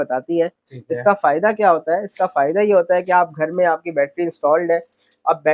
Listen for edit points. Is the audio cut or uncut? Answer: uncut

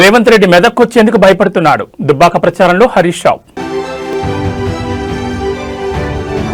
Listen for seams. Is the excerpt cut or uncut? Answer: uncut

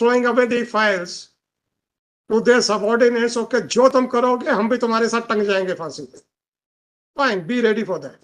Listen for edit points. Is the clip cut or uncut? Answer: uncut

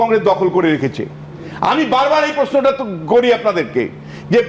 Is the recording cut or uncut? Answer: uncut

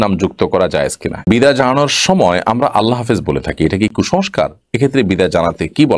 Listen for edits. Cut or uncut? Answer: cut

